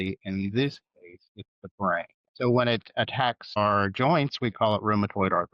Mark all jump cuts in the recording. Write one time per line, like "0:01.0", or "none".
0:02.2
0:03.6